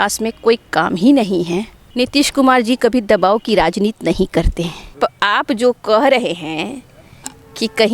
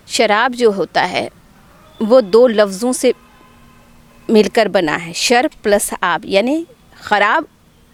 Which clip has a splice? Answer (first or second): first